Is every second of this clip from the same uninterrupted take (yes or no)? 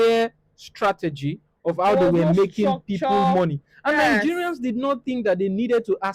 yes